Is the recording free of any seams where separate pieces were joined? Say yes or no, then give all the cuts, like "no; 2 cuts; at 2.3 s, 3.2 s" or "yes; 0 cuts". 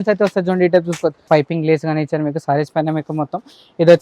no; 1 cut; at 1.2 s